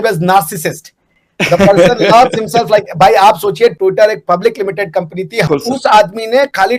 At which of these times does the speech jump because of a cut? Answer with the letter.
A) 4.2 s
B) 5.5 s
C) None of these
B